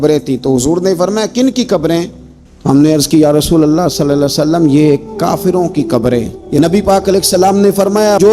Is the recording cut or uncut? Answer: cut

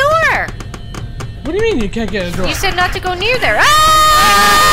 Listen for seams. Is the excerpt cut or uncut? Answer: uncut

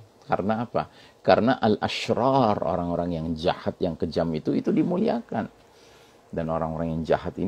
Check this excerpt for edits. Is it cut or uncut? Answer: uncut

